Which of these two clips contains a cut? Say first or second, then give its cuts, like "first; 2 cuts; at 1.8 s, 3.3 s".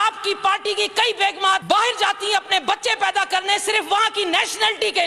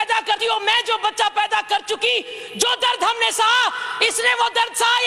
first; 1 cut; at 1.6 s